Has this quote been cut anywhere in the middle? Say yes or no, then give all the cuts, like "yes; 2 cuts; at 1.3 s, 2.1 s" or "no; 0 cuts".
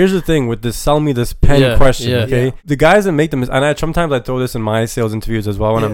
yes; 1 cut; at 2.6 s